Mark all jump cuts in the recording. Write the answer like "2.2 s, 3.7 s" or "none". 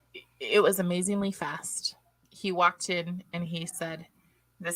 none